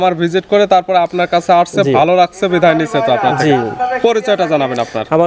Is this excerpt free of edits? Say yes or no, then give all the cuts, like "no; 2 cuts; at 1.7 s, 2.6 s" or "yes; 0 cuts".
yes; 0 cuts